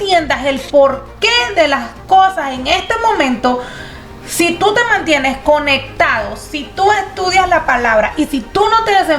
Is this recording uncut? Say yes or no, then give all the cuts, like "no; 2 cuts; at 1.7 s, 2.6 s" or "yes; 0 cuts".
yes; 0 cuts